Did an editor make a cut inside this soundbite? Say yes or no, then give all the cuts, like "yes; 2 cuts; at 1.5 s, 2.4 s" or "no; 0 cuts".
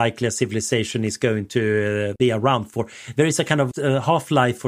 yes; 2 cuts; at 2.1 s, 3.7 s